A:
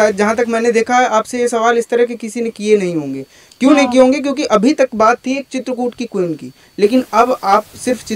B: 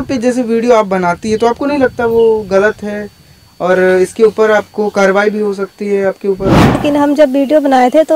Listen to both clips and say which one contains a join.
B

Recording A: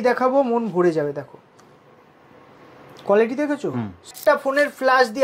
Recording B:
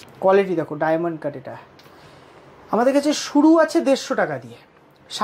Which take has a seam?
A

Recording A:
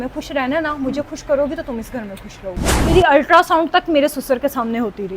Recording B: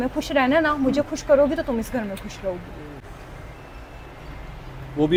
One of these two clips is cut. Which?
A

